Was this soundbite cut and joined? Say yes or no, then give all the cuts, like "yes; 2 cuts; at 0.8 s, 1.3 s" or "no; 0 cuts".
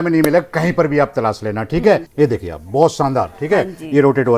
yes; 1 cut; at 2.1 s